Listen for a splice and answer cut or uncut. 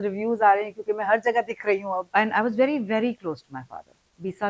cut